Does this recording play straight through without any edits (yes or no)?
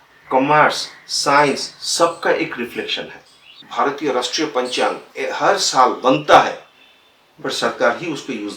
no